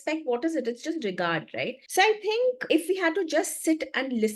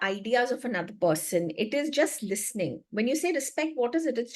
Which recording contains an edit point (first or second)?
first